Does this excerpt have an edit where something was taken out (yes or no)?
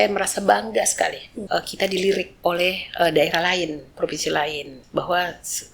yes